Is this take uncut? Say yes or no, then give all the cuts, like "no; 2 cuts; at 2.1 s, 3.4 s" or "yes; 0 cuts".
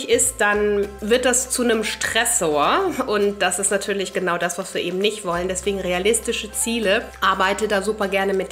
no; 2 cuts; at 1.0 s, 7.1 s